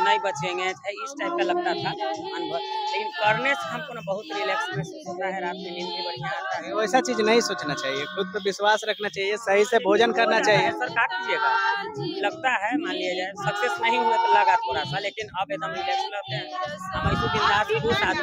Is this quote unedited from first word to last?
yes; 0 cuts

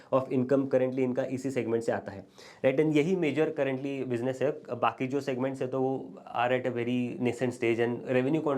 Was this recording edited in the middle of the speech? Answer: no; 0 cuts

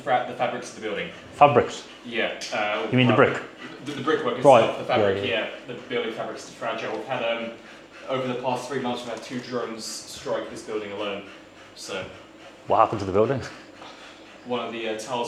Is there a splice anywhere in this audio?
no; 0 cuts

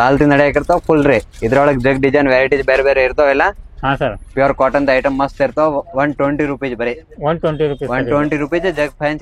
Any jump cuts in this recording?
no; 0 cuts

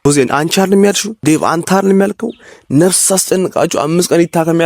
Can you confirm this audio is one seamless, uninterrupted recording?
no; 1 cut; at 1.1 s

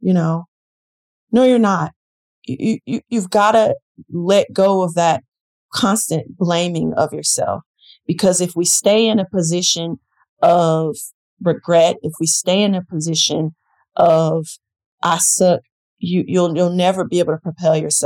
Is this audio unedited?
yes; 0 cuts

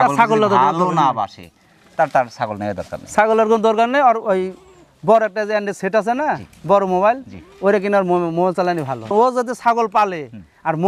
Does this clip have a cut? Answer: no; 0 cuts

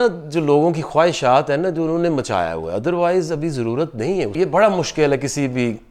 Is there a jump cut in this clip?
yes; 1 cut; at 4.3 s

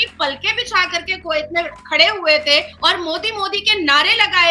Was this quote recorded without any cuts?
no; 1 cut; at 2.7 s

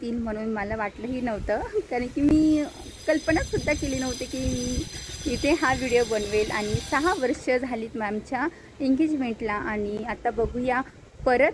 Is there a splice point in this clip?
no; 0 cuts

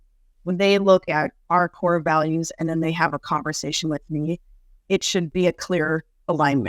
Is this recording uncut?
no; 1 cut; at 5.3 s

